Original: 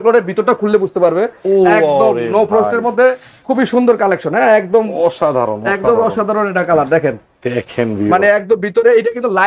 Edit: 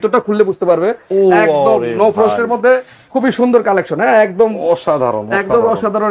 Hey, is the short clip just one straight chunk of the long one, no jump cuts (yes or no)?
yes